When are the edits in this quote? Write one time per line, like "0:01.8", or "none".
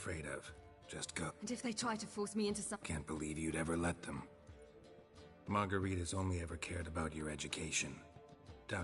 0:01.3
0:02.7